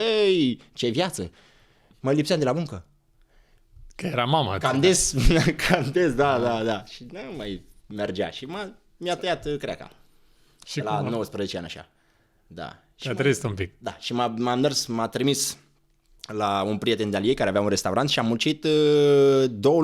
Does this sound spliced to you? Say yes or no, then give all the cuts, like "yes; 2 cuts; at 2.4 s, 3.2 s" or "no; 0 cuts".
no; 0 cuts